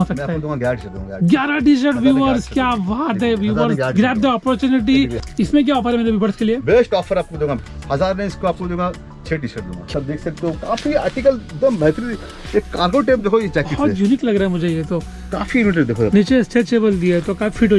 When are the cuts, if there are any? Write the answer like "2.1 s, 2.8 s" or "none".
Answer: 5.1 s, 7.6 s, 9.3 s